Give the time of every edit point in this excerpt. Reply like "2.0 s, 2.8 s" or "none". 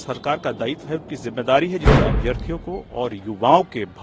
1.9 s